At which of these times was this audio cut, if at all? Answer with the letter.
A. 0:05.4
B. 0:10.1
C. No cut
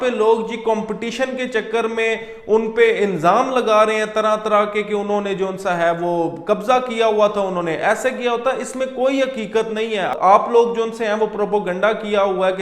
B